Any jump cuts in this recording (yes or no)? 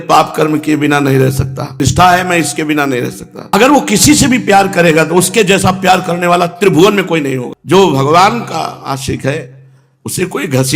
yes